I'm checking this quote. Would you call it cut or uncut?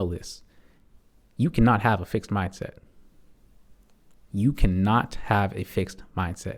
uncut